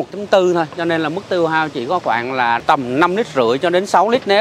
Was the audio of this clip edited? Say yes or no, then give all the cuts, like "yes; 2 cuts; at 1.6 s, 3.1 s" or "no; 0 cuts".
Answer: yes; 1 cut; at 2.6 s